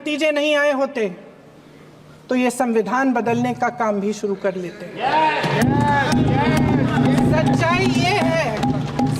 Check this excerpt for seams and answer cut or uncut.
uncut